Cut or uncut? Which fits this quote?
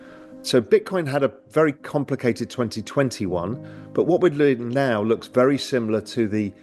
uncut